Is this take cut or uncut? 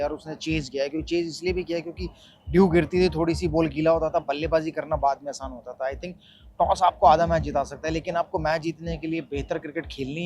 uncut